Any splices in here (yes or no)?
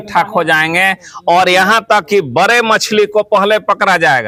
no